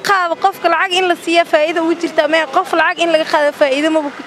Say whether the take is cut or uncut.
uncut